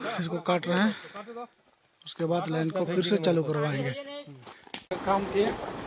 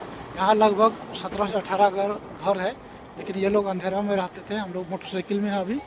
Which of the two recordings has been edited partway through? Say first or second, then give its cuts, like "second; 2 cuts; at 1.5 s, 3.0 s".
first; 1 cut; at 4.7 s